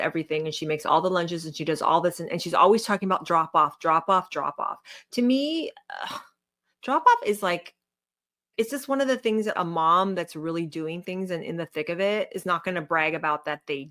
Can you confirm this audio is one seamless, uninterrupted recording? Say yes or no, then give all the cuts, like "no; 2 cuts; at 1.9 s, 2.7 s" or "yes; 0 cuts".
yes; 0 cuts